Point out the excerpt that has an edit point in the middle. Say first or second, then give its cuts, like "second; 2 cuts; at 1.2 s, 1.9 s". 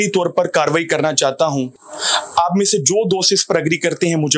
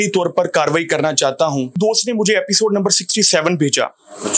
second; 1 cut; at 1.7 s